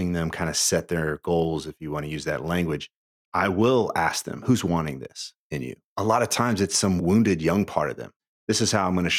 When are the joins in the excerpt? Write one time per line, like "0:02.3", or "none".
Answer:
0:03.2
0:04.4
0:05.9
0:07.0
0:08.3